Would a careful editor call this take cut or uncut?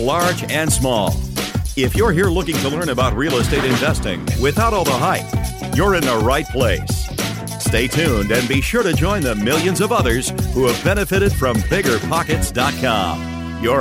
uncut